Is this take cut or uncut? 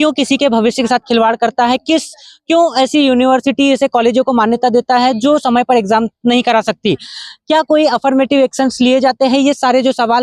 uncut